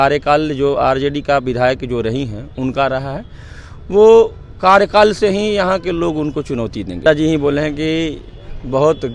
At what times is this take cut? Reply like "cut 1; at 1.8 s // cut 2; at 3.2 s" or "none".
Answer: cut 1; at 7.0 s